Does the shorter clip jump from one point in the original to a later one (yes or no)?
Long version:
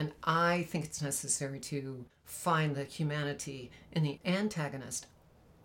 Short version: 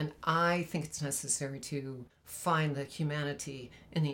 no